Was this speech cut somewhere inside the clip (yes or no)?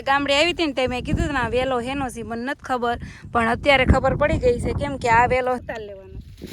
yes